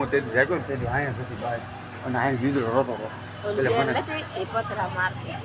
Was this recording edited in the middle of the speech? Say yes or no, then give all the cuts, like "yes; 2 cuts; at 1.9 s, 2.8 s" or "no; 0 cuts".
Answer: no; 0 cuts